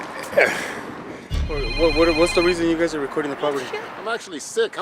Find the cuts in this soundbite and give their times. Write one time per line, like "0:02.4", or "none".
0:01.6
0:03.8